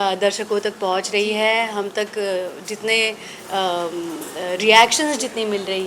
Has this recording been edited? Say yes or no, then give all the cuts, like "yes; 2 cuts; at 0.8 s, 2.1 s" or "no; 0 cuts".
no; 0 cuts